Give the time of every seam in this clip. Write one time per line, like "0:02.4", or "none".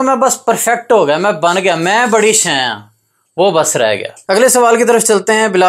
0:04.1